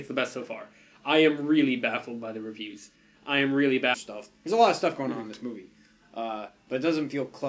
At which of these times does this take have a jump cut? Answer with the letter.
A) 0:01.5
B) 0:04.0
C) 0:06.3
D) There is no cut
D